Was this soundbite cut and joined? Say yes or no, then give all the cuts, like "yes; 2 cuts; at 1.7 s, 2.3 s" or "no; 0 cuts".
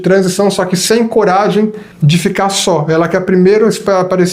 yes; 1 cut; at 1.9 s